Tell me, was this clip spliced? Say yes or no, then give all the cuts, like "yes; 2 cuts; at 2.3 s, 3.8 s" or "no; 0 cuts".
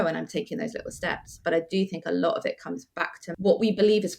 yes; 1 cut; at 3.2 s